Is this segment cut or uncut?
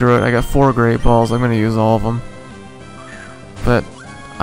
uncut